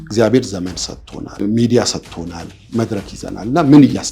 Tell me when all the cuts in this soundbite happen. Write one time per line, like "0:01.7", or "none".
0:01.4
0:02.5